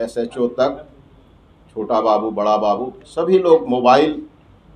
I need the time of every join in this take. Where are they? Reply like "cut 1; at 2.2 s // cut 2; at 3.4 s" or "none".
none